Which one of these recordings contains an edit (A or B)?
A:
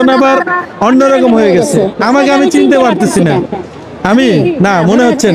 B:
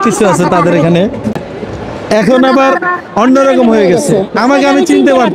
B